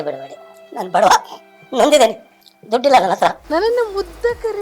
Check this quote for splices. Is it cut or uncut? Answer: cut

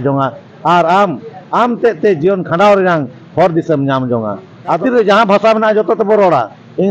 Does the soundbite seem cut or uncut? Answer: cut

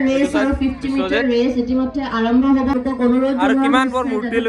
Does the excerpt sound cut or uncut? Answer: cut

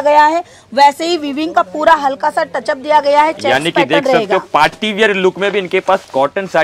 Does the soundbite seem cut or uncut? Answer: uncut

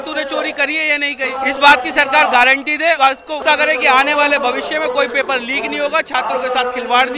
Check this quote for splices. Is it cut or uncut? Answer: cut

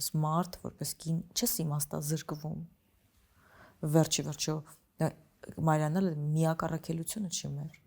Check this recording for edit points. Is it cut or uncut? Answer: uncut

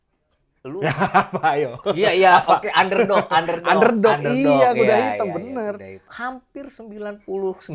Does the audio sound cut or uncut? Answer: cut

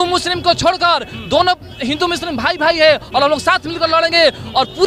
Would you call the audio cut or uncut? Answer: uncut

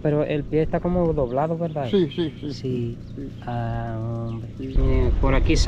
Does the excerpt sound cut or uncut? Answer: cut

